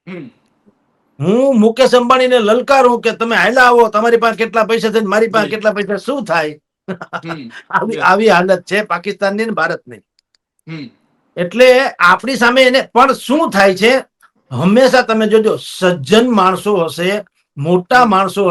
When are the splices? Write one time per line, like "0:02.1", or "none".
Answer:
none